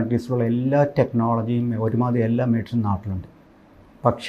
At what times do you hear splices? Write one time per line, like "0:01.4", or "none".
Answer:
none